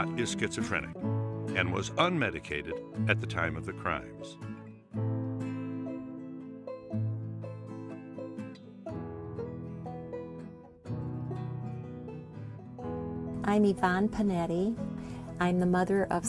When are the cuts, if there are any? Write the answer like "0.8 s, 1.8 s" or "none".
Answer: 15.3 s